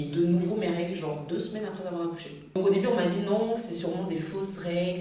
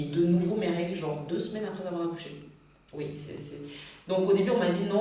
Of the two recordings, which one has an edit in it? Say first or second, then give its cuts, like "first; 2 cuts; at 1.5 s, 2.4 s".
first; 1 cut; at 2.6 s